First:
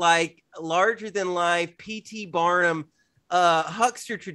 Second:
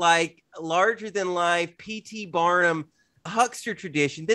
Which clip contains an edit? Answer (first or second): second